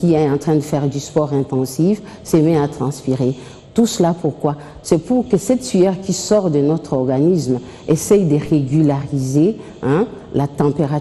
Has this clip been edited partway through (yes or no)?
no